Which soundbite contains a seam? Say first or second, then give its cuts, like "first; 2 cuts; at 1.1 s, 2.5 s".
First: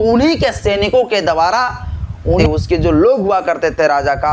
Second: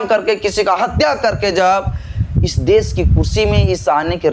first; 1 cut; at 2.4 s